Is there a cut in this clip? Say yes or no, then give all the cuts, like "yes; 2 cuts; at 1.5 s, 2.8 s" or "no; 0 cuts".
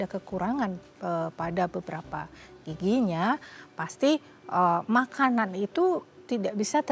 no; 0 cuts